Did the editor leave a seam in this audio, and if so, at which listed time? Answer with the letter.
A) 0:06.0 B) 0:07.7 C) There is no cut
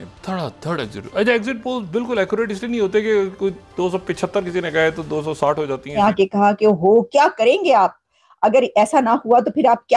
A